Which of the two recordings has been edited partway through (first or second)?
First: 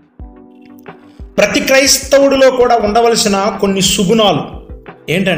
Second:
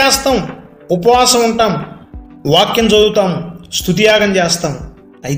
first